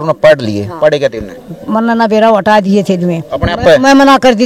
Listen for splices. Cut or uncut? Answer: uncut